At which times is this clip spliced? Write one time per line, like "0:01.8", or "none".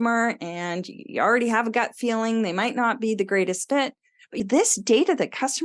0:04.4